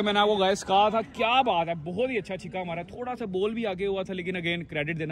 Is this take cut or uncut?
uncut